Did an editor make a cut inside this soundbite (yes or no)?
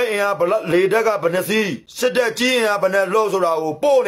yes